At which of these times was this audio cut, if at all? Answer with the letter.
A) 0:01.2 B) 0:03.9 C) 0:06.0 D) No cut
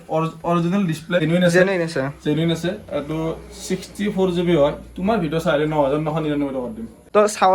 A